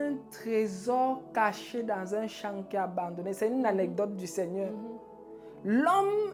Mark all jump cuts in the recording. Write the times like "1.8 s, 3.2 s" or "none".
none